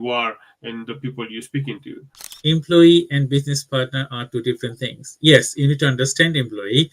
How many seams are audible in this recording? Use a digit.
1